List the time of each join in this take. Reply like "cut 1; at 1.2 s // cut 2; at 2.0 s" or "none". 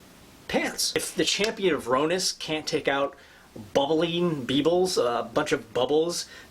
cut 1; at 1.0 s